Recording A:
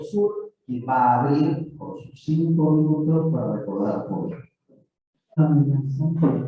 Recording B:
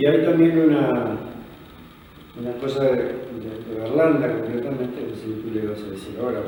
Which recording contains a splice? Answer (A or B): A